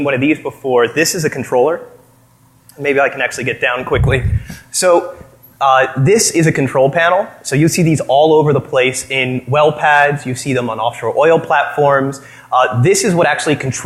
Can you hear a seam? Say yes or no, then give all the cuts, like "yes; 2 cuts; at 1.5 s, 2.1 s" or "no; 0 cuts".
yes; 1 cut; at 10.2 s